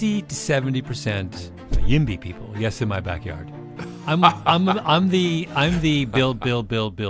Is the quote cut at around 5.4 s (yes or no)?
no